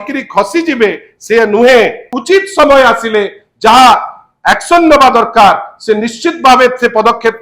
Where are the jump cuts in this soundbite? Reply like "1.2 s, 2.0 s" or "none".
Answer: 2.2 s